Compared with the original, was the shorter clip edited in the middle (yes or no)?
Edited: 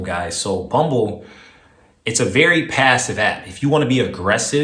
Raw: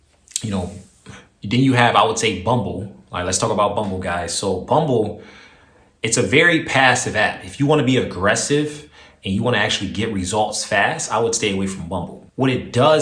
no